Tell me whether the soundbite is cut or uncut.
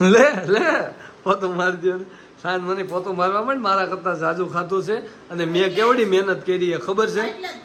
uncut